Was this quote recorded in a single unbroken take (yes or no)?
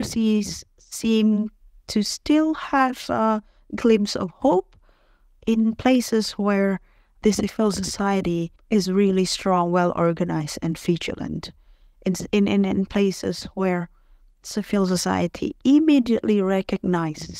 yes